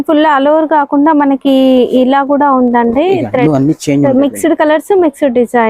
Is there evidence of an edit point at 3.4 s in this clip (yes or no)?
yes